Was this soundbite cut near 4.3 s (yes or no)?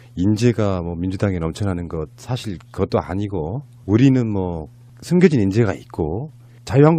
yes